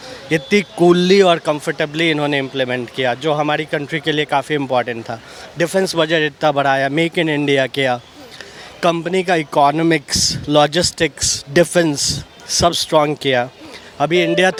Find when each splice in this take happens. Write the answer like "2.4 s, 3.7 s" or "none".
none